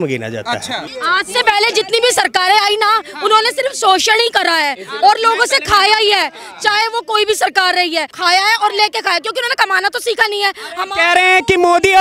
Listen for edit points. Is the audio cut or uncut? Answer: cut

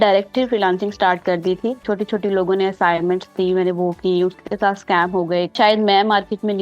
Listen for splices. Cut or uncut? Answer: cut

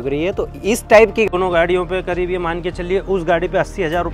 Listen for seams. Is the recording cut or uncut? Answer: cut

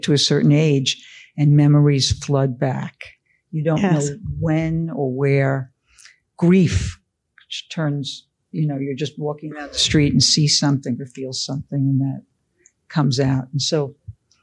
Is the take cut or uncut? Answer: uncut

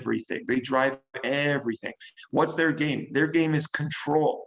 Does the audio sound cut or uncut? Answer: uncut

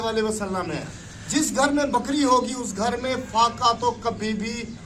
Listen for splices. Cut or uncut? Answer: uncut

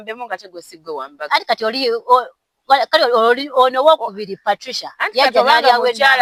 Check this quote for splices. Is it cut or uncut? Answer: uncut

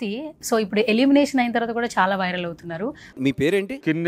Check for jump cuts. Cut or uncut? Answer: cut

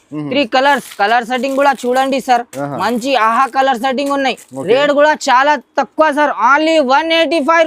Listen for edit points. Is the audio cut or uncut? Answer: uncut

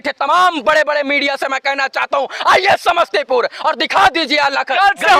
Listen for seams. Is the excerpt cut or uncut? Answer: uncut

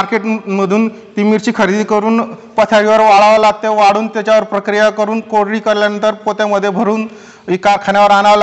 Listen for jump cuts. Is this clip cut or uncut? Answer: uncut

